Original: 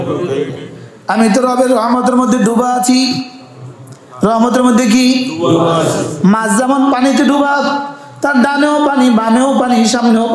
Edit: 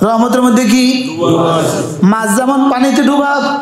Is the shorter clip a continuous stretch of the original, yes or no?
yes